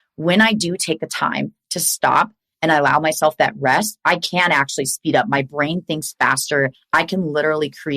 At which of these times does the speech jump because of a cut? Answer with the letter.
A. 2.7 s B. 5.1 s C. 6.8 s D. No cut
C